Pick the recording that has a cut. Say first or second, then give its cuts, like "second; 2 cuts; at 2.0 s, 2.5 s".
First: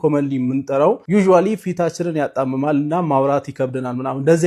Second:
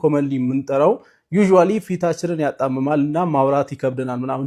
first; 1 cut; at 1.0 s